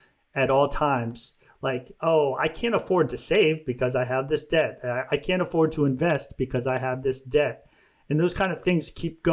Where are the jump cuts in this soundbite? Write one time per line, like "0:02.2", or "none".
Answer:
none